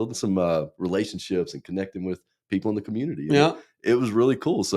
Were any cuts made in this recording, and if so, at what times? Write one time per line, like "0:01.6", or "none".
none